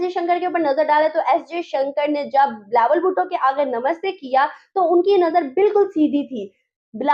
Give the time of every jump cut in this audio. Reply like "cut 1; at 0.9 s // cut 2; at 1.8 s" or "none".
none